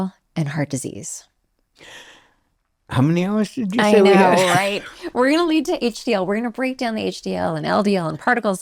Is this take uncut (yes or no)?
yes